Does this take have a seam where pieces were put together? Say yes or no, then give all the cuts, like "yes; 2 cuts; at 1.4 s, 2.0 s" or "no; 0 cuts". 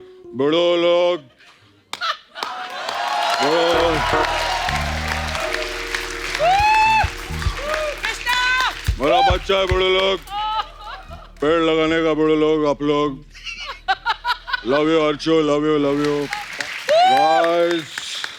yes; 1 cut; at 16.4 s